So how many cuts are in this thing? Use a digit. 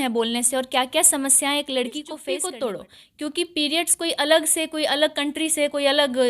1